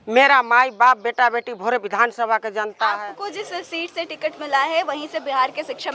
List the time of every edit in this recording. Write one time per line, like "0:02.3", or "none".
0:03.1